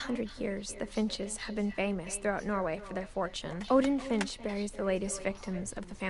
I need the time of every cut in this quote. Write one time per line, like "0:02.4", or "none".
0:03.6